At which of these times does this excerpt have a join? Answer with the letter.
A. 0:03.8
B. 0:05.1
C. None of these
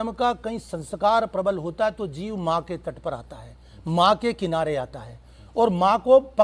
C